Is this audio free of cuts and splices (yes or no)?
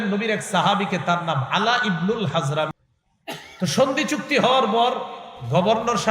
no